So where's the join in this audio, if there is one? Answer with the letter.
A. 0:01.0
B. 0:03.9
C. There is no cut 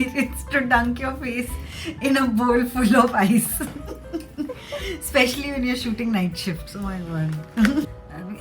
C